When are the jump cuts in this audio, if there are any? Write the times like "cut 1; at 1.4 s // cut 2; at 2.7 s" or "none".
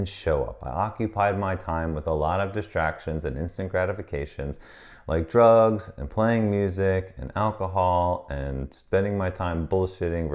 none